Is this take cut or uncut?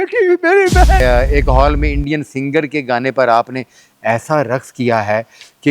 cut